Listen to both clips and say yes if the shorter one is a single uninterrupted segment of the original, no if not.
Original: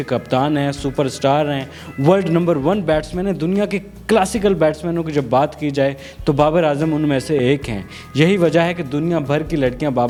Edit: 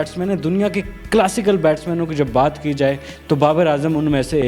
yes